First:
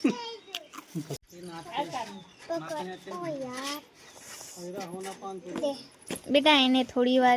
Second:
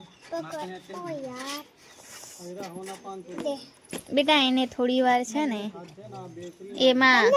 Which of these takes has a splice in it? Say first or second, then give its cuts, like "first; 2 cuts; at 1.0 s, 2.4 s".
first; 1 cut; at 1.2 s